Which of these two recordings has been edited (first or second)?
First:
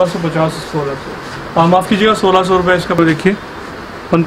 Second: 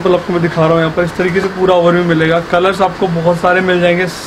first